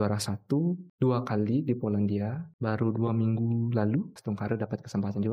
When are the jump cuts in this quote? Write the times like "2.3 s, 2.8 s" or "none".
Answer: 0.9 s, 2.5 s, 4.2 s